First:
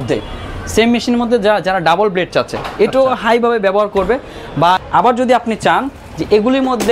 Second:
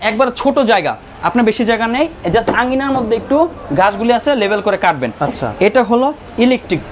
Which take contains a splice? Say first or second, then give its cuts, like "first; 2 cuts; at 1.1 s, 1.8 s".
first; 1 cut; at 4.8 s